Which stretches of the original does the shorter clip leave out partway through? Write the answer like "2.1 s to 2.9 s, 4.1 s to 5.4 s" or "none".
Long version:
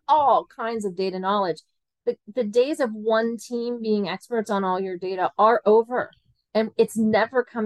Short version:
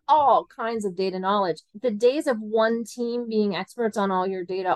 1.7 s to 2.2 s